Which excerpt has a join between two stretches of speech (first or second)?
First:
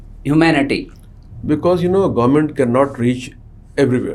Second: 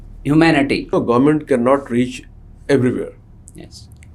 second